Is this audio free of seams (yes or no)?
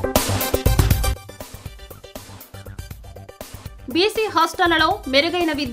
no